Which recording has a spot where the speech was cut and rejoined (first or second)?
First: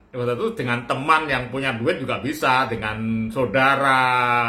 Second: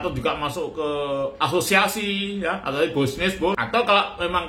second